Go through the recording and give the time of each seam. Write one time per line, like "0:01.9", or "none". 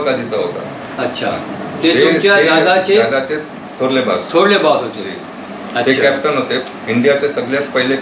none